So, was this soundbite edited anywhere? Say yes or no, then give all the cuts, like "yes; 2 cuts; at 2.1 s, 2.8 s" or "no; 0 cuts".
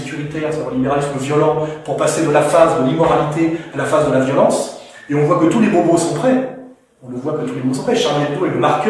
no; 0 cuts